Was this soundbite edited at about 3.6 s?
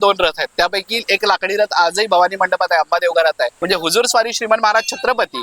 yes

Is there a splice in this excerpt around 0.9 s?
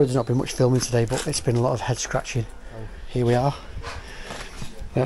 no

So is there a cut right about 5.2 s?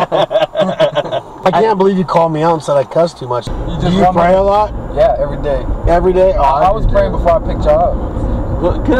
no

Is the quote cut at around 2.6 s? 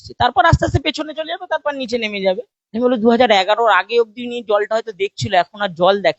yes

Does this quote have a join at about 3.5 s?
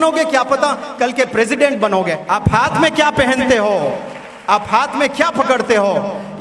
no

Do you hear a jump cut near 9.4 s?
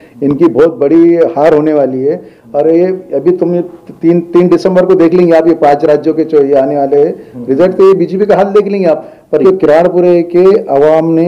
yes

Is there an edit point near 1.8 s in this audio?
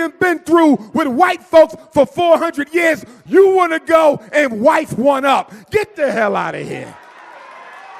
no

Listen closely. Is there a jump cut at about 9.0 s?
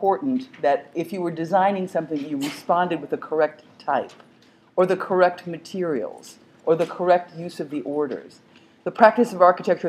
yes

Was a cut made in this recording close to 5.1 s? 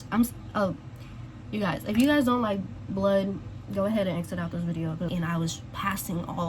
yes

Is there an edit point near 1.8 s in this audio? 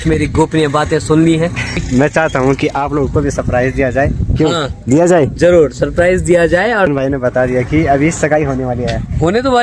yes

